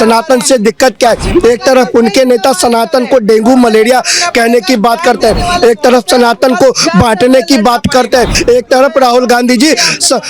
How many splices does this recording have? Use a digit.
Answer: 1